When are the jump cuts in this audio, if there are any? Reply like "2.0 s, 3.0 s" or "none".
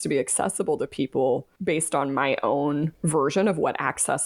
1.5 s, 3.0 s